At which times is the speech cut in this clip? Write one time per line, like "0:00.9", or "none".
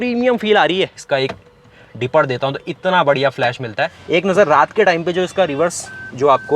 0:01.0
0:03.9